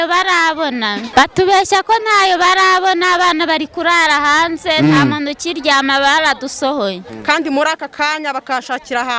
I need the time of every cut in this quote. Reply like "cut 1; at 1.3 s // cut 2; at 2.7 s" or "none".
cut 1; at 1.0 s // cut 2; at 7.1 s